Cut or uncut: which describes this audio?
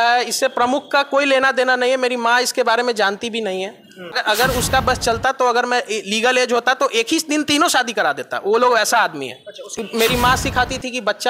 cut